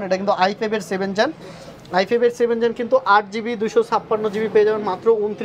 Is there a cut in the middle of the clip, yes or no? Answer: no